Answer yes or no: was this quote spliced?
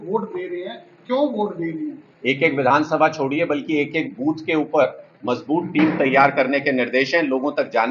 yes